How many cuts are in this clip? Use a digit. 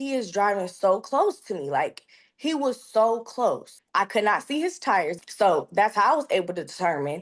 2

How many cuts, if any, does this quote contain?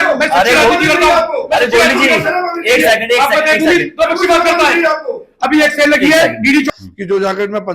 1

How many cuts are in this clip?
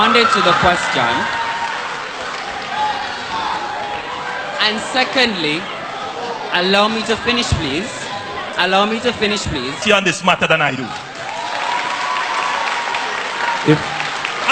1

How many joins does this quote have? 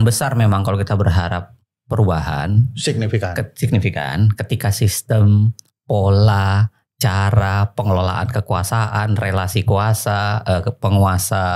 0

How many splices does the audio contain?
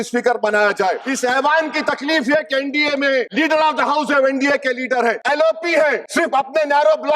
4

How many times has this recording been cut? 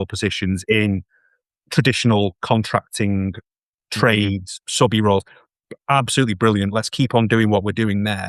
0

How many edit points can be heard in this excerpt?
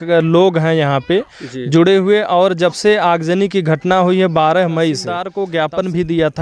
1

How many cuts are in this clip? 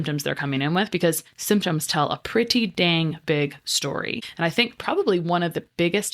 1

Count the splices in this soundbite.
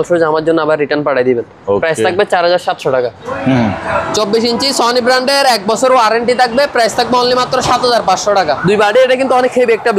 2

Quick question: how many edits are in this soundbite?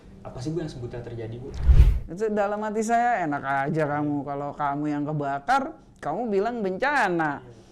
1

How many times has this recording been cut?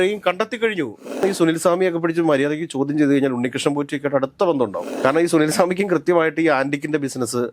2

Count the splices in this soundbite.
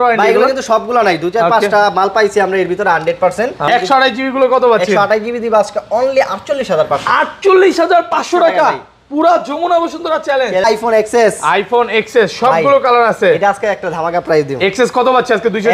2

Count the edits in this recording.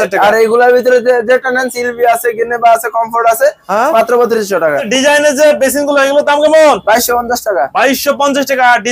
1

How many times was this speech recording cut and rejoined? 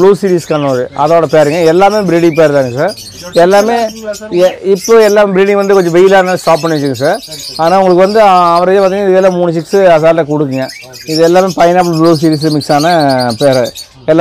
0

